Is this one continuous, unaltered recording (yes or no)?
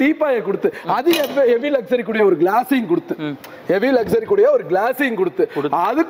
yes